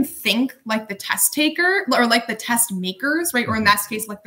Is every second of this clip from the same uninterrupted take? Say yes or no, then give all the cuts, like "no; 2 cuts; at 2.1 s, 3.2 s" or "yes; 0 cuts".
yes; 0 cuts